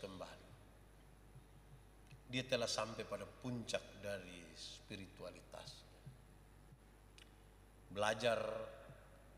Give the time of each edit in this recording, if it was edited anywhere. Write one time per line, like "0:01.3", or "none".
0:06.7